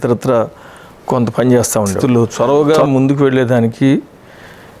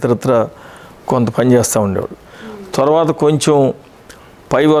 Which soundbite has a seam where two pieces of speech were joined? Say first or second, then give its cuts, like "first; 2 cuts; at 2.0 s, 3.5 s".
first; 1 cut; at 2.0 s